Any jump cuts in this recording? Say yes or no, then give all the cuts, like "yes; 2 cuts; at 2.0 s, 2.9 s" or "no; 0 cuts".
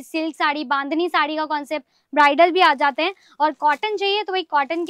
no; 0 cuts